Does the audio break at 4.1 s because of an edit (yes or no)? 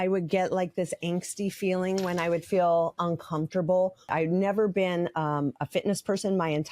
yes